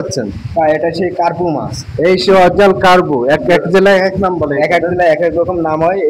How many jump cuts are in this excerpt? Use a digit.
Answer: 0